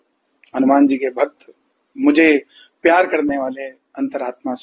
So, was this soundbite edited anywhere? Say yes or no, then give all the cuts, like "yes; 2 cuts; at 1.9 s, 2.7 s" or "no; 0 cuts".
no; 0 cuts